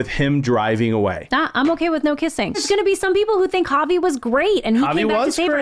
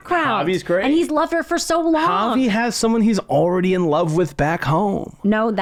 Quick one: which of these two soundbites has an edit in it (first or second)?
first